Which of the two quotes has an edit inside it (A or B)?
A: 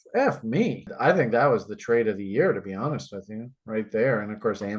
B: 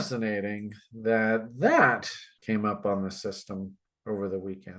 A